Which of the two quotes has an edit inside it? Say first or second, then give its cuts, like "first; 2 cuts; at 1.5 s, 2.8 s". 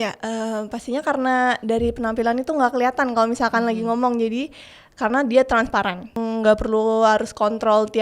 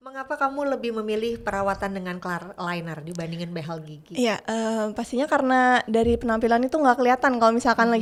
first; 1 cut; at 6.1 s